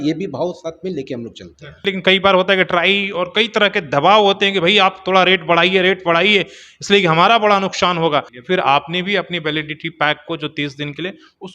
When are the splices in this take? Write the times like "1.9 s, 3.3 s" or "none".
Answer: 1.8 s, 8.3 s